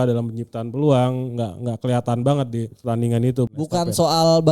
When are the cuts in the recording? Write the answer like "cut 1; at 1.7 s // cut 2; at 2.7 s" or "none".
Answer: cut 1; at 2.7 s // cut 2; at 3.6 s